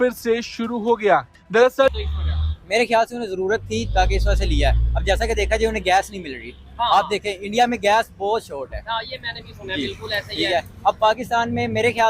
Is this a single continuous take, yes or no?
no